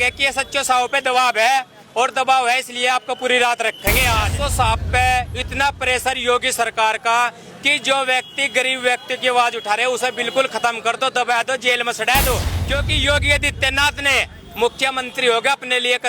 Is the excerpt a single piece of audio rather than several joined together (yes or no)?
no